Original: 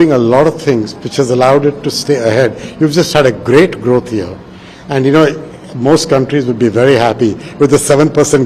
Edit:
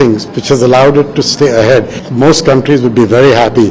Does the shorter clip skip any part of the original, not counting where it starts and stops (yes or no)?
yes